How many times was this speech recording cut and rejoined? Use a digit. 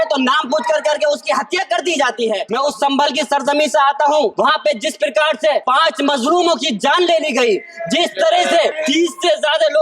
4